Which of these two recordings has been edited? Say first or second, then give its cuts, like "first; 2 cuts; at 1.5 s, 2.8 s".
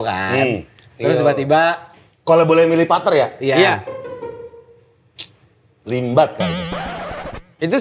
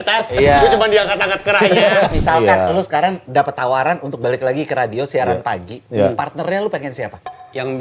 second; 1 cut; at 2.1 s